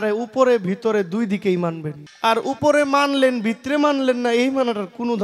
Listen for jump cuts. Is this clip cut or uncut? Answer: cut